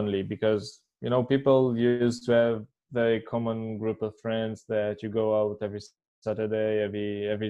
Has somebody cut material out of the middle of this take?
no; 0 cuts

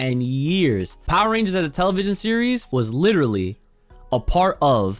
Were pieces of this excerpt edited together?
yes; 2 cuts; at 0.9 s, 2.6 s

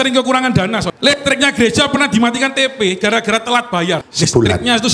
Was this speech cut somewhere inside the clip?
yes; 2 cuts; at 0.9 s, 4.1 s

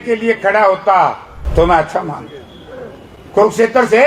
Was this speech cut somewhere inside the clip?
yes; 1 cut; at 1.3 s

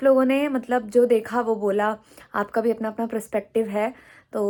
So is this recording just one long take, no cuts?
yes; 0 cuts

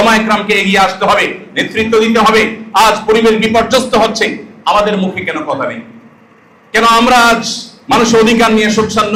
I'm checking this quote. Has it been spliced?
no; 0 cuts

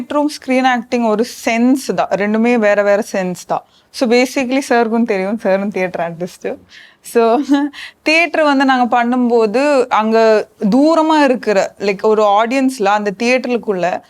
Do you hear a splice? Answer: no; 0 cuts

